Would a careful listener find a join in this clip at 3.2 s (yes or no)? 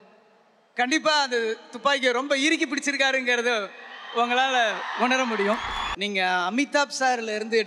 no